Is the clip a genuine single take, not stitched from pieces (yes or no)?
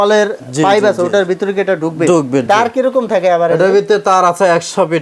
no